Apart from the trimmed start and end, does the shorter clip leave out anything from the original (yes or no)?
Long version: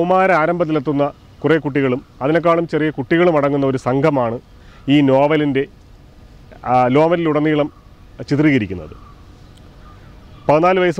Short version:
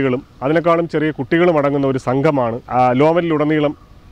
yes